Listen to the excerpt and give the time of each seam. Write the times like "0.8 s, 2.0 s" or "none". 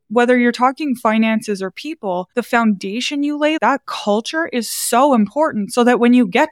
3.6 s